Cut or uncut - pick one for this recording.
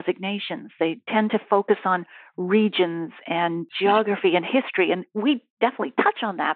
uncut